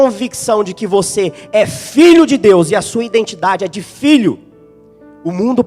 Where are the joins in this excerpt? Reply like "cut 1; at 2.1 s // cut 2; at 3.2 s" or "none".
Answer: none